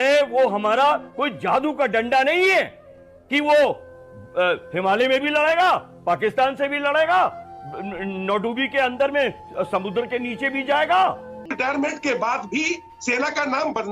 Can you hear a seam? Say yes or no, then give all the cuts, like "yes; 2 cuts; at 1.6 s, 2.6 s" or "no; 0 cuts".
yes; 1 cut; at 11.5 s